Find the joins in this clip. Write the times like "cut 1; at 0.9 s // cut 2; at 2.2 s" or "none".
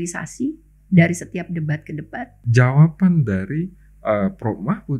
cut 1; at 2.3 s